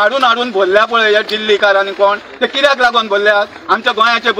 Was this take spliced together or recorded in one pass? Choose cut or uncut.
uncut